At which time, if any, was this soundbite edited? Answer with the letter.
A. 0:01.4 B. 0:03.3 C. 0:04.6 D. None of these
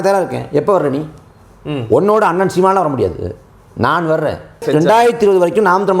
C